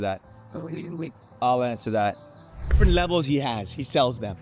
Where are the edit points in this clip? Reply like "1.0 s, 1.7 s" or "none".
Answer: 2.8 s